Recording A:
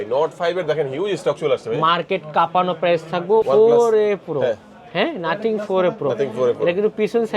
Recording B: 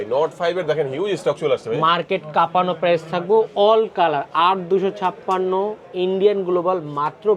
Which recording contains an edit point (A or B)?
A